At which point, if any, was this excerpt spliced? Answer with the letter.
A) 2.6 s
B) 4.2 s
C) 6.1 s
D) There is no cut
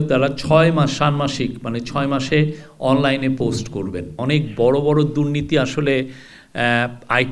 B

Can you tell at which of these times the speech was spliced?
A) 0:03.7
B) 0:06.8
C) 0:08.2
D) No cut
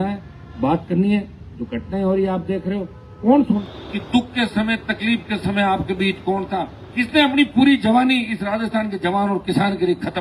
A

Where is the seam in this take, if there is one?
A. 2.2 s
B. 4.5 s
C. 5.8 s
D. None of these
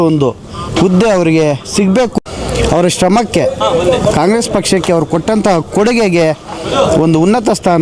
A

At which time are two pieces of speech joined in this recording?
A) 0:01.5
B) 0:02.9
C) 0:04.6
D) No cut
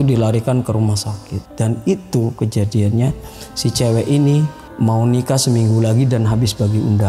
C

